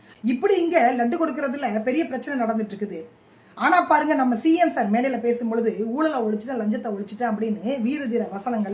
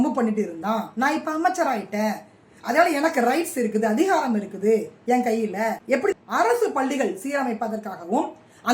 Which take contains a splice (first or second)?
second